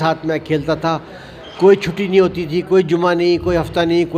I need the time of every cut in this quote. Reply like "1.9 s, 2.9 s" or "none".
none